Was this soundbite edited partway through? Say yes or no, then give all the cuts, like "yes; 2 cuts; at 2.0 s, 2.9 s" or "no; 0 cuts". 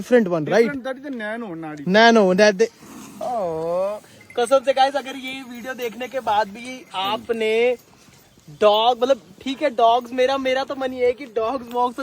yes; 1 cut; at 2.9 s